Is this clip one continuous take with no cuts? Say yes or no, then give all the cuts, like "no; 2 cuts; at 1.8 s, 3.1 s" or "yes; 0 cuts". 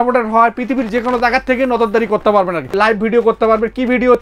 no; 1 cut; at 2.7 s